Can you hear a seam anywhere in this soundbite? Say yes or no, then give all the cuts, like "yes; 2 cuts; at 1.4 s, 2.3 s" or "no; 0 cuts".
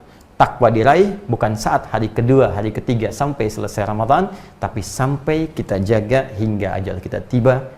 no; 0 cuts